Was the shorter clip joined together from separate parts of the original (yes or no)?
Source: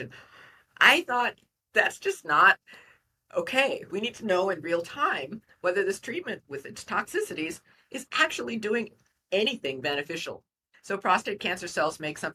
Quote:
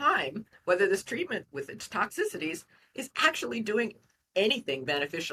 no